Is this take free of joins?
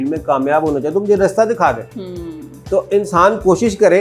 yes; 0 cuts

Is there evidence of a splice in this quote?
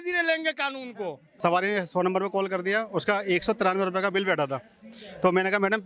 yes; 1 cut; at 1.4 s

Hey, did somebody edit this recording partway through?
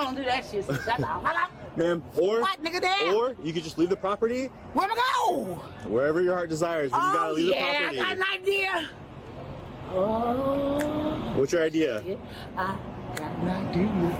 no; 0 cuts

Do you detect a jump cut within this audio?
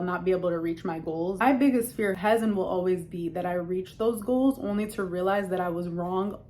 yes; 2 cuts; at 1.4 s, 2.1 s

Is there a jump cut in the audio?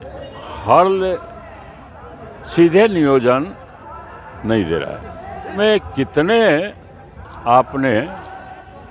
yes; 1 cut; at 5.6 s

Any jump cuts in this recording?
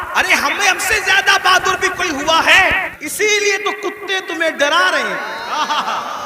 yes; 1 cut; at 2.9 s

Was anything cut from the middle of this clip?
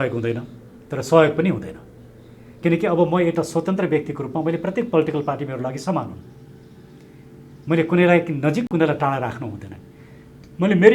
no; 0 cuts

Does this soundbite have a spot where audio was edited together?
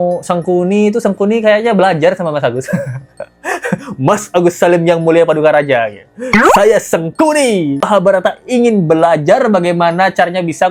no; 0 cuts

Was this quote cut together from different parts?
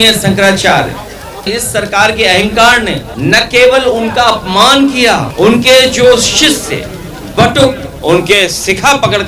yes; 4 cuts; at 1.4 s, 3.0 s, 5.3 s, 7.9 s

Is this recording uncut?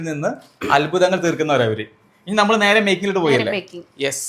yes; 0 cuts

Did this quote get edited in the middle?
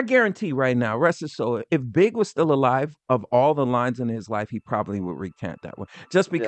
no; 0 cuts

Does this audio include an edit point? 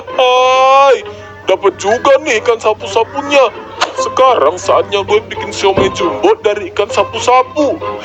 no; 0 cuts

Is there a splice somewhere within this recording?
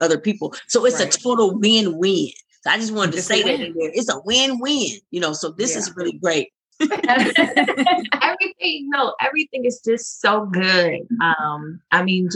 yes; 1 cut; at 6.6 s

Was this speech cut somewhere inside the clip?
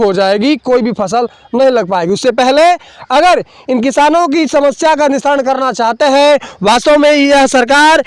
no; 0 cuts

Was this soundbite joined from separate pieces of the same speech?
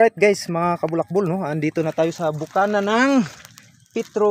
no; 0 cuts

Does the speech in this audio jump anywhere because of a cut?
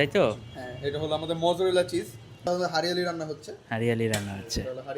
yes; 1 cut; at 2.5 s

